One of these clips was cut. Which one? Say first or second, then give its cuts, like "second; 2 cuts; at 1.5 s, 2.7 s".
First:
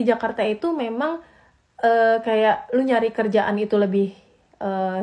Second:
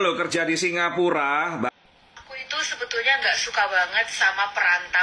second; 1 cut; at 1.7 s